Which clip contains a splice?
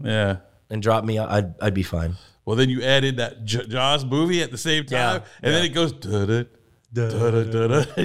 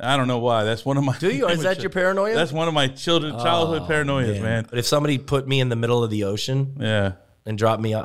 second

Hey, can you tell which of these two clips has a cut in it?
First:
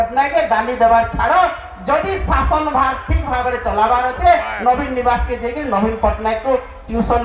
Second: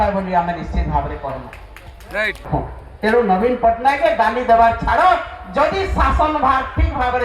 second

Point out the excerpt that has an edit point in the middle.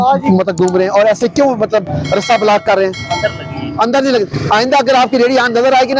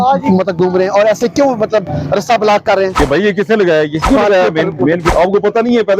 second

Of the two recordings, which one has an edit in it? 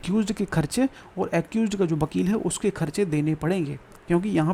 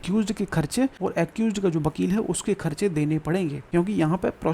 second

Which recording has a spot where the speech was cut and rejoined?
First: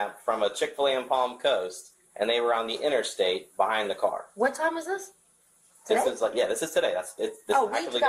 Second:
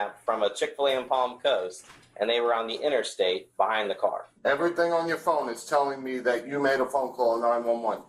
second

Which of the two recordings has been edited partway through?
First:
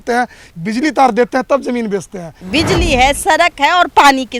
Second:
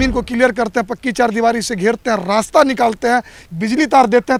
first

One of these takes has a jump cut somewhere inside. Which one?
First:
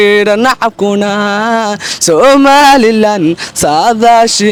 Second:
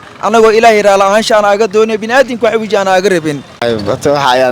second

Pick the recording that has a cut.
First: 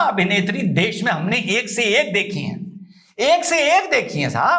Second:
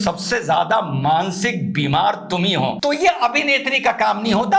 second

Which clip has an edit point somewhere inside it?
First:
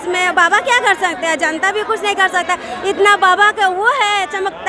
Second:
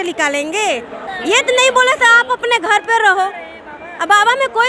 second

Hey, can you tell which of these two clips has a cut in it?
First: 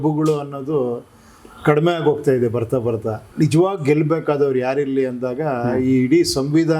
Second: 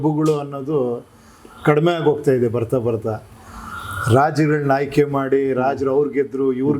first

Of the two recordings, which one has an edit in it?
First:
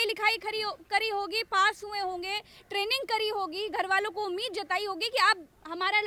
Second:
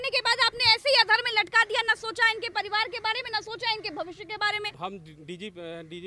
second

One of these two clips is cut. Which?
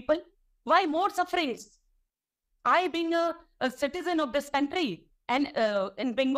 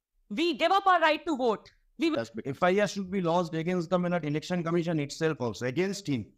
second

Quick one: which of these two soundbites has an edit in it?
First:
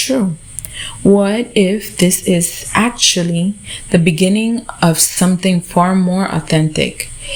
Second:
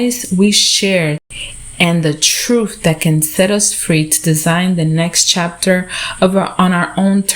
second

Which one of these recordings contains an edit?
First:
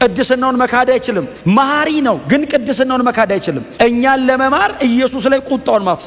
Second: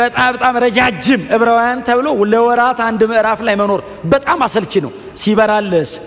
first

